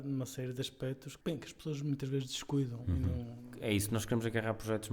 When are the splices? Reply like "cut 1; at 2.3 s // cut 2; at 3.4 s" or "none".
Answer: cut 1; at 1.1 s // cut 2; at 3.4 s